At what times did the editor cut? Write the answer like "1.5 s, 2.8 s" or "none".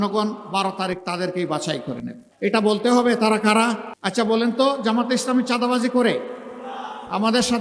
2.2 s, 3.9 s